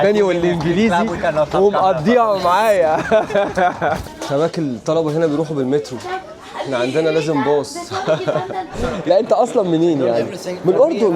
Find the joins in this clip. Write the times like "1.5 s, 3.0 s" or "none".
4.1 s, 8.8 s